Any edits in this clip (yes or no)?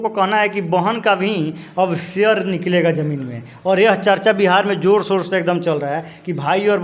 no